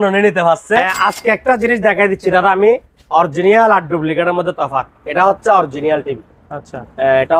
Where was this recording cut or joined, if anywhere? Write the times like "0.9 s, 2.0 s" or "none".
1.0 s